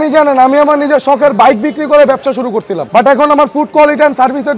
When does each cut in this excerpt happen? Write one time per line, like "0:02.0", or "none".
none

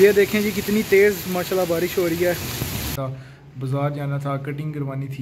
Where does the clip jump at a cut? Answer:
0:02.9

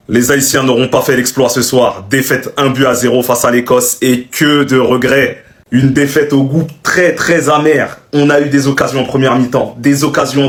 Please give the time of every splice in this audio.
none

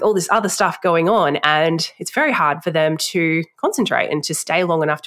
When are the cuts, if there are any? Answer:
none

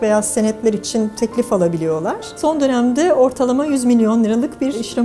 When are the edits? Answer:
0:02.4

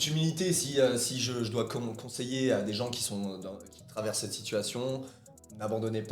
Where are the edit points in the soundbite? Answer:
0:05.2

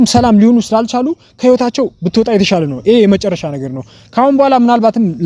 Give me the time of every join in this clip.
none

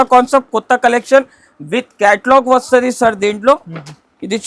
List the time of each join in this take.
none

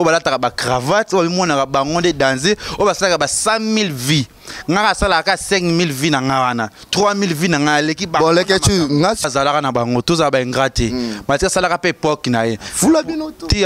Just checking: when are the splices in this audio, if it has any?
0:09.2

